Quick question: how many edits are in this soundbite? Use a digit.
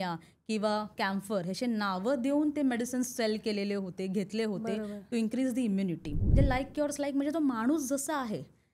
1